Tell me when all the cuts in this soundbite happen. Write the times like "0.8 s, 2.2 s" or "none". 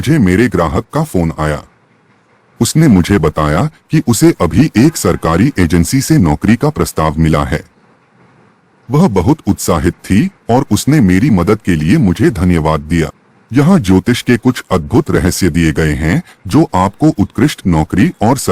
13.2 s

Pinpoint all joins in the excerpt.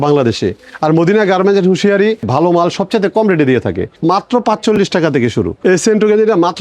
2.3 s, 3.9 s, 5.6 s

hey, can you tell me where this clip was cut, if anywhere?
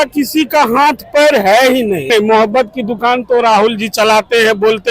2.1 s

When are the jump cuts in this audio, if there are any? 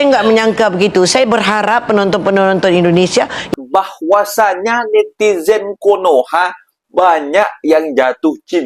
3.5 s

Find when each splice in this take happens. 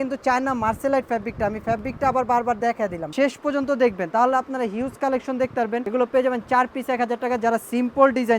3.0 s, 5.9 s

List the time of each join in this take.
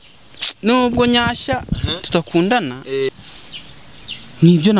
3.1 s

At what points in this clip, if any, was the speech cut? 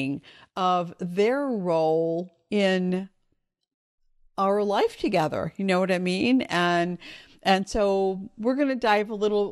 none

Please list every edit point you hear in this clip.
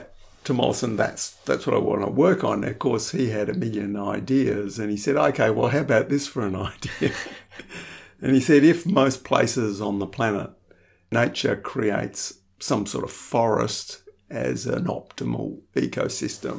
11.1 s

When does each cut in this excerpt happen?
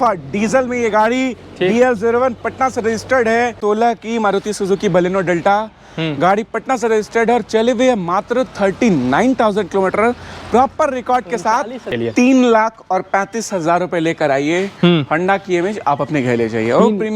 3.6 s, 11.9 s

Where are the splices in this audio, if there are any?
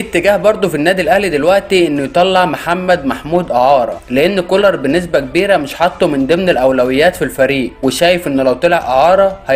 none

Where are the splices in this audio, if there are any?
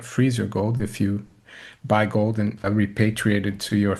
2.6 s

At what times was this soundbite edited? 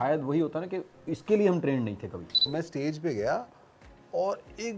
2.5 s

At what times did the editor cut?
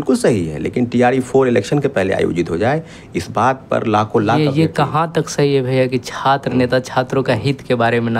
none

